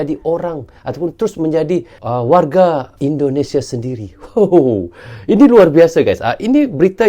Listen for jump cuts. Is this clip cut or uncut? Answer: cut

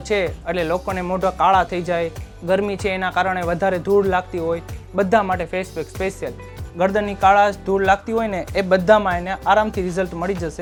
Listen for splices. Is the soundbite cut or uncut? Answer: uncut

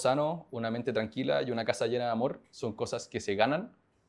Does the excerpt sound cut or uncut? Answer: uncut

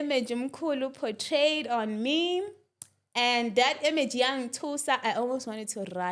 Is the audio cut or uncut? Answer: uncut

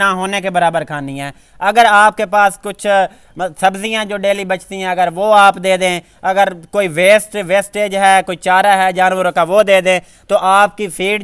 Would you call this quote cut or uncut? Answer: uncut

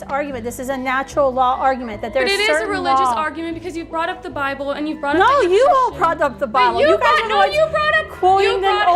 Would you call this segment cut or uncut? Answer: uncut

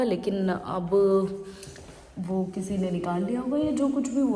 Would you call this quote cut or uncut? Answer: uncut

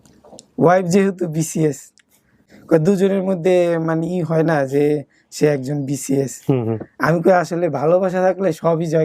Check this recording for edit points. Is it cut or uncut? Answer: cut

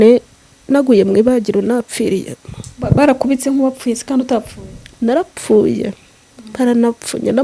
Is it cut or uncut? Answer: uncut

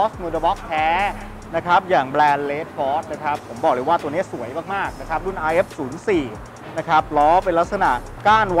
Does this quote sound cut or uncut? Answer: uncut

